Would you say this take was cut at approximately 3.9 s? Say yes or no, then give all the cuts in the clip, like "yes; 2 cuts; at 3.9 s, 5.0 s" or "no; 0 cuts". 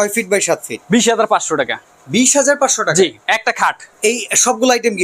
yes; 1 cut; at 3.9 s